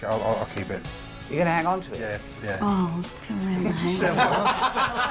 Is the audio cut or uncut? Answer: uncut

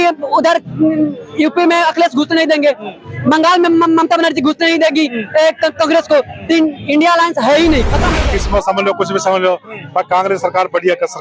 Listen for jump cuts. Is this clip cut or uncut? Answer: cut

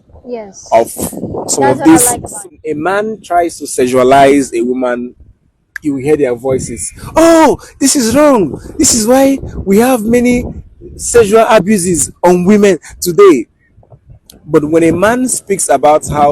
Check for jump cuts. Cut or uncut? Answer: cut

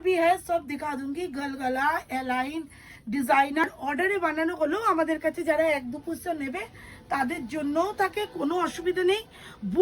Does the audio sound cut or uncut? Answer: cut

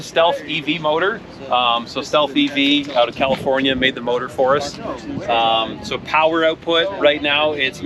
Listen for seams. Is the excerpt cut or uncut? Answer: uncut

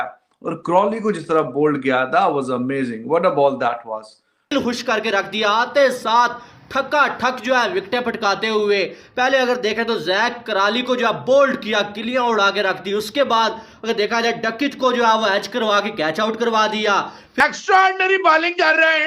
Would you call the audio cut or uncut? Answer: cut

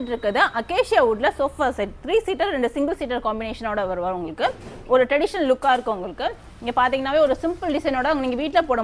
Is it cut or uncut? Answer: uncut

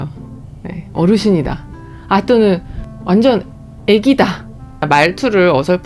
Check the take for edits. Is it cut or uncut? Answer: cut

